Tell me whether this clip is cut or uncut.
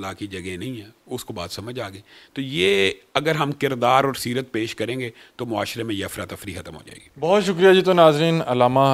uncut